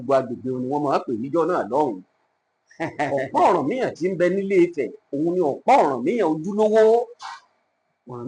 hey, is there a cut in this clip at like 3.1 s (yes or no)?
yes